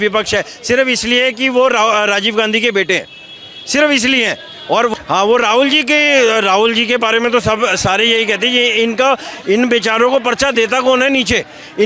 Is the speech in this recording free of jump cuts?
no; 1 cut; at 4.9 s

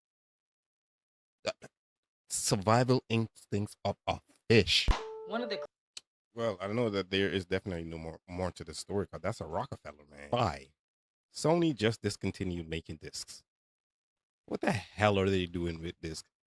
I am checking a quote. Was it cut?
yes; 2 cuts; at 4.9 s, 10.3 s

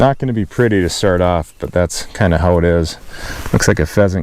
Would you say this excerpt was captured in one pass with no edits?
yes; 0 cuts

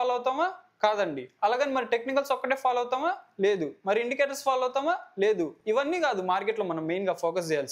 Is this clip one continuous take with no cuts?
yes; 0 cuts

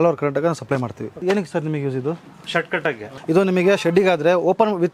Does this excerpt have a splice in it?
yes; 2 cuts; at 1.2 s, 3.1 s

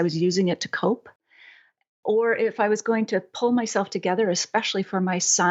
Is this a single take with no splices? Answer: yes; 0 cuts

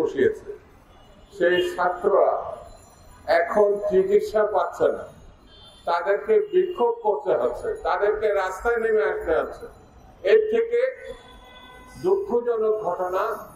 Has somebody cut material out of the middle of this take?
no; 0 cuts

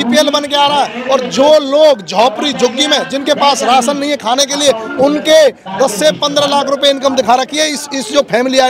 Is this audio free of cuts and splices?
yes; 0 cuts

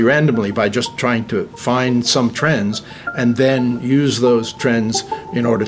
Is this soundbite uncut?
no; 1 cut; at 1.5 s

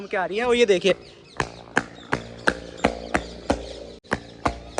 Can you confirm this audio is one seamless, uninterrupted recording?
no; 1 cut; at 3.9 s

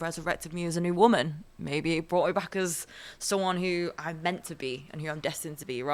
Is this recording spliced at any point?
no; 0 cuts

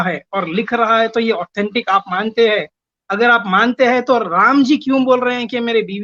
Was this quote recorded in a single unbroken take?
yes; 0 cuts

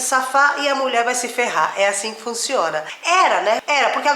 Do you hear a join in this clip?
no; 0 cuts

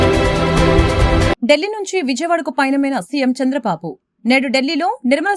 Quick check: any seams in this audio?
yes; 1 cut; at 1.0 s

